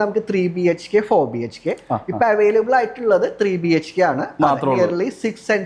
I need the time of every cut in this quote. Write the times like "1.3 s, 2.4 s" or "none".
none